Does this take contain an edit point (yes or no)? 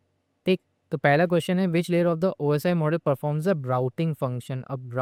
no